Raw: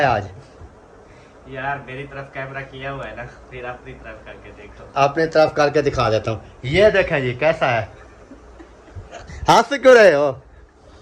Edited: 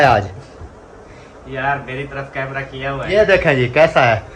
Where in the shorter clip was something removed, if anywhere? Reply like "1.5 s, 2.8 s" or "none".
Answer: 2.9 s